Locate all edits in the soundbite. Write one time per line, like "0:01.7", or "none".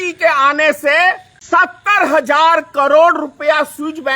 0:01.3